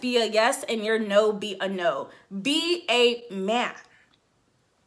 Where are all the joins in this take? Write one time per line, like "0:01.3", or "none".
none